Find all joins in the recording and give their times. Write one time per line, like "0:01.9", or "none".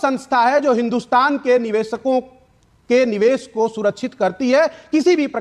none